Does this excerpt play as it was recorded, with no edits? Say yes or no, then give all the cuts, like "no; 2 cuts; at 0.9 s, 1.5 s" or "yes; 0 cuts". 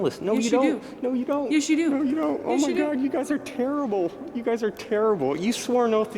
yes; 0 cuts